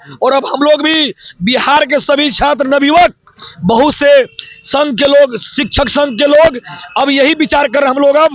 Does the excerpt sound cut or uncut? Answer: uncut